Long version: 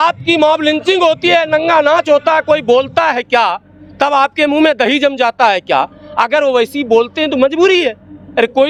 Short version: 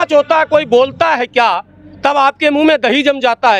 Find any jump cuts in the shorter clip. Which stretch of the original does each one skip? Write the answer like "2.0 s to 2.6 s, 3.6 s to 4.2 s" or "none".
none